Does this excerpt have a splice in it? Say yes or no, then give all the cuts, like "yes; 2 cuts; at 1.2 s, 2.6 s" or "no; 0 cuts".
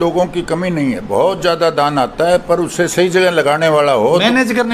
no; 0 cuts